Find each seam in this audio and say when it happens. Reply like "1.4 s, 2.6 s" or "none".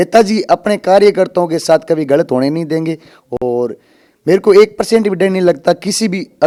none